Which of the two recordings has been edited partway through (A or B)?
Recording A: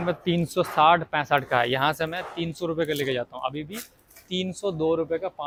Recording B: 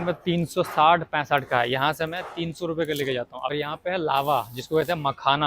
B